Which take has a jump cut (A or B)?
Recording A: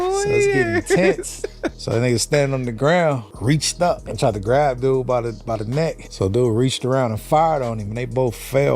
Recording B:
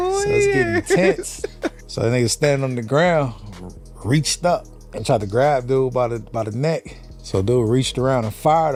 A